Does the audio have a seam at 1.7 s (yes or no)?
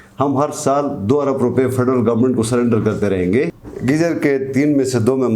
no